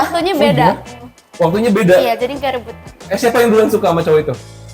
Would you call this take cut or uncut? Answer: cut